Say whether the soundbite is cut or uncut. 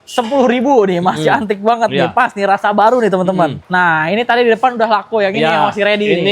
cut